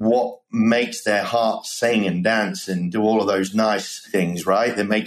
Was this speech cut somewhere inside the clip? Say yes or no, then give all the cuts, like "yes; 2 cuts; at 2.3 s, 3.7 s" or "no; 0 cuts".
yes; 1 cut; at 4.1 s